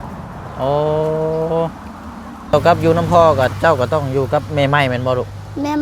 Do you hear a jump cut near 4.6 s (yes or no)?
no